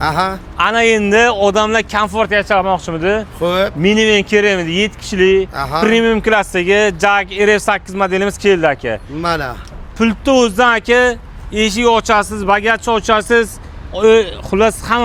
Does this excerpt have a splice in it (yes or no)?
no